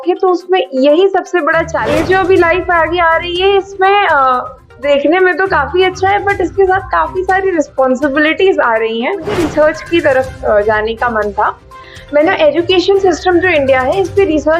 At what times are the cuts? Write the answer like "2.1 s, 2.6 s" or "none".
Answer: 1.8 s, 9.4 s